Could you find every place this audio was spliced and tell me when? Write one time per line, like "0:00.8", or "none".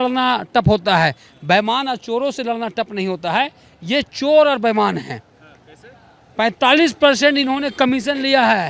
none